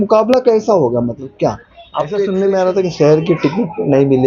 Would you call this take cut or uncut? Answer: cut